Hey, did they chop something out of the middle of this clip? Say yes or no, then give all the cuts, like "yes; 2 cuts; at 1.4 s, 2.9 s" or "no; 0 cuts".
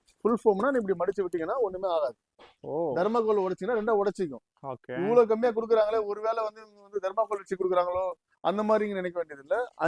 no; 0 cuts